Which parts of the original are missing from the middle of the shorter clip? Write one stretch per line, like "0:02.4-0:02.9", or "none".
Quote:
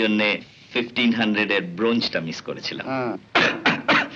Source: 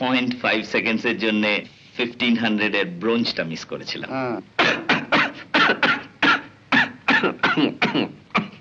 none